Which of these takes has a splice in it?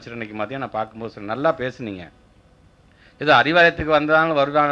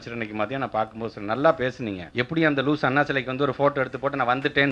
second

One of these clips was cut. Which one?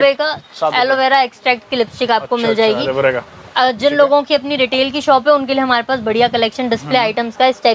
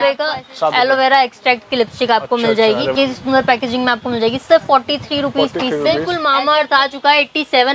second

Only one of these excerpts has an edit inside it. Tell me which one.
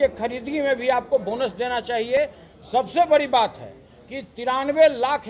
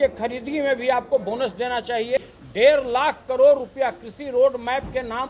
second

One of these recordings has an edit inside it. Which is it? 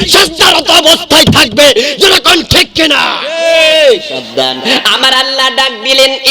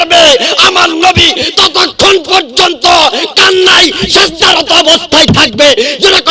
first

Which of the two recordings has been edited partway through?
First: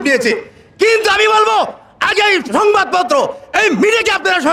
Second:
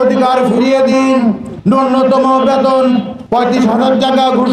second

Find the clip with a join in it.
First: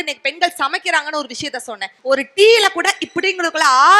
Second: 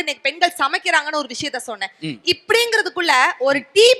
first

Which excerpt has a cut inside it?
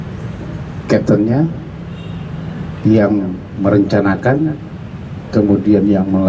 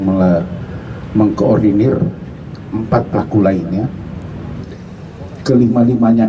second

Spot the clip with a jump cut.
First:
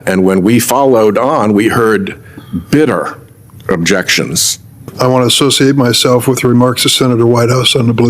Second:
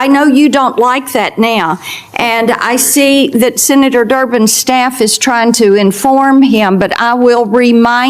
first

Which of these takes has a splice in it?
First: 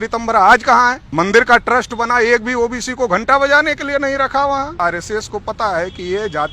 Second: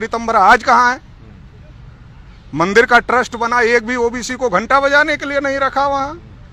first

